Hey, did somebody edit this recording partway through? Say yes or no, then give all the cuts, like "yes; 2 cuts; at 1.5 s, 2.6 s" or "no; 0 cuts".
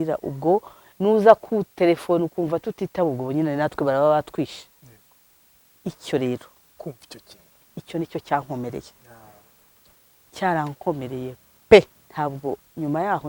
yes; 1 cut; at 12.0 s